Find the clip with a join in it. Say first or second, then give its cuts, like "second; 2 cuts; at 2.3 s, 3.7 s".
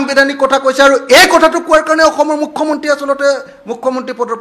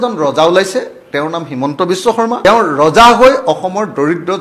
second; 1 cut; at 2.4 s